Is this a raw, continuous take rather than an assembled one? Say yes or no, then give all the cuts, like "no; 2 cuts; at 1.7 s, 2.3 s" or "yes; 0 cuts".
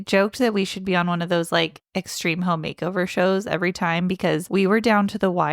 no; 1 cut; at 4.4 s